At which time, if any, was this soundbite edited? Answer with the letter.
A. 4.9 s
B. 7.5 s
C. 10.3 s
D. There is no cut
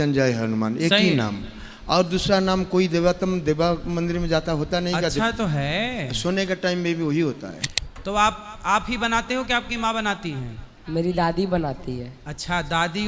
B